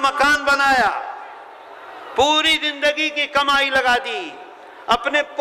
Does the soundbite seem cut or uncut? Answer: uncut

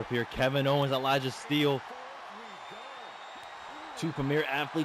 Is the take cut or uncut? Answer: uncut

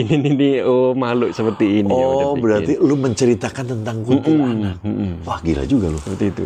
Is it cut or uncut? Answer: uncut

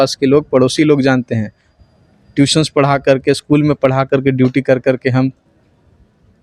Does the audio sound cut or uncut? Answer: uncut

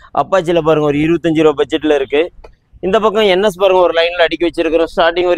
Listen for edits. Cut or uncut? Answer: uncut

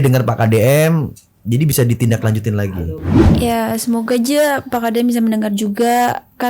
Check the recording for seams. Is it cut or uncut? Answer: cut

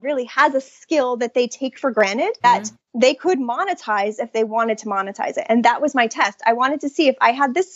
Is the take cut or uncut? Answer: cut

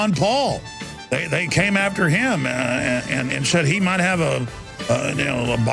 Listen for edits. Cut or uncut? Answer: cut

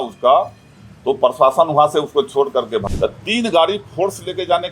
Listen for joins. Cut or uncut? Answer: cut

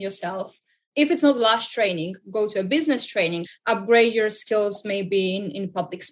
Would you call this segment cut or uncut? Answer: cut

